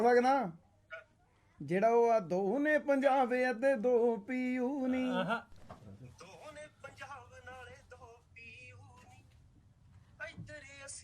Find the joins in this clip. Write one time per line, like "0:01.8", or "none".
0:05.5